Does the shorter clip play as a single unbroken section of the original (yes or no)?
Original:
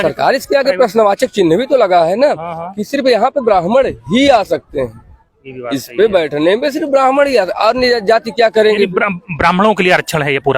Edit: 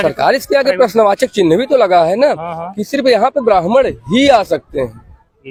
yes